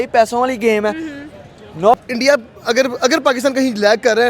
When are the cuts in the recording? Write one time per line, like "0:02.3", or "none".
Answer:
0:01.9